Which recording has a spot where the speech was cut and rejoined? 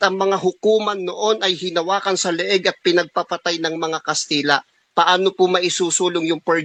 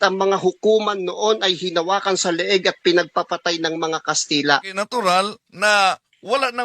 second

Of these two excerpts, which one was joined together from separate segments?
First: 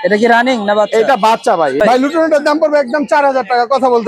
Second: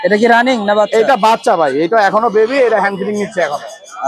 first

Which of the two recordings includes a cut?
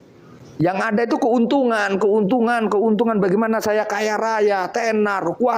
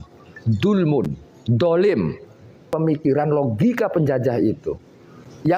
second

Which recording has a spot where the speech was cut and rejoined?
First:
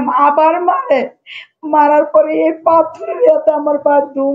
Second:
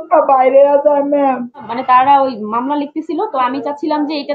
second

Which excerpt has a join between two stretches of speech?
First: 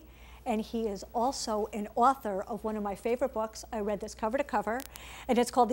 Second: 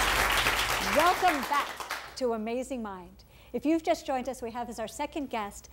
first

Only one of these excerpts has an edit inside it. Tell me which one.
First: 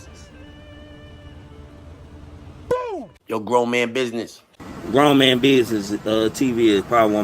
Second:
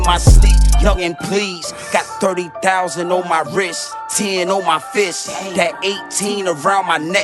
first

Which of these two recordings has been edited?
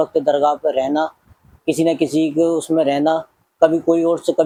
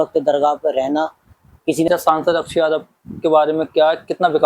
second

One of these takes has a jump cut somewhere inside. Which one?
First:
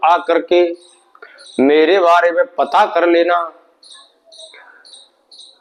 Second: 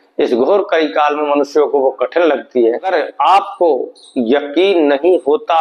second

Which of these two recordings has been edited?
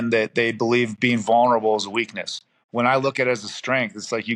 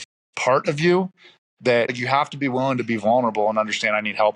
second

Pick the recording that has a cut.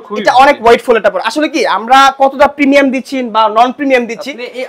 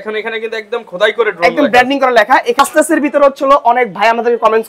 second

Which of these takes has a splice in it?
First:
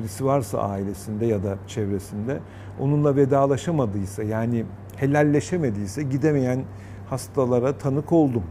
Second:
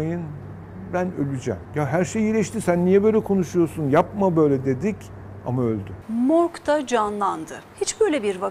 second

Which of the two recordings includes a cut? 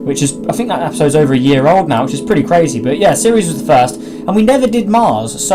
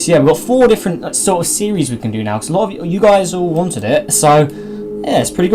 first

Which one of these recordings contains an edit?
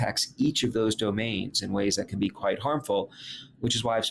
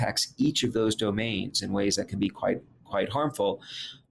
first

